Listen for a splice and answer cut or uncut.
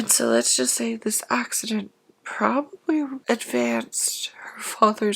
cut